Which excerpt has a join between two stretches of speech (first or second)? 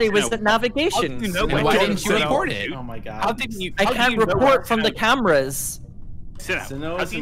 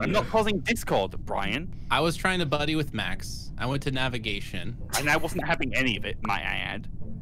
second